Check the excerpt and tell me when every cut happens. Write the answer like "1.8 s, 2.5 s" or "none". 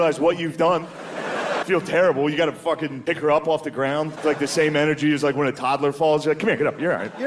1.5 s, 3.1 s, 4.1 s